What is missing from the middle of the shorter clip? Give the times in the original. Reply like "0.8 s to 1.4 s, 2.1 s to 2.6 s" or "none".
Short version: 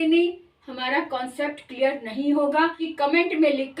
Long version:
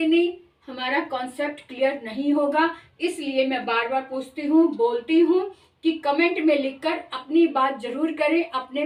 2.8 s to 5.9 s